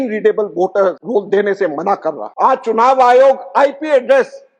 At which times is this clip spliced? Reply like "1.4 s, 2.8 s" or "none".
1.0 s, 2.3 s